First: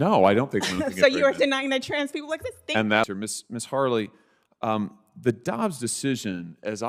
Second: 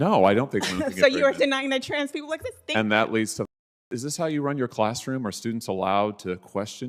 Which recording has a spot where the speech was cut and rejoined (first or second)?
first